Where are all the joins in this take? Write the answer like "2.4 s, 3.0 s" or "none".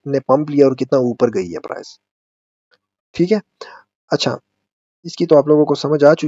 none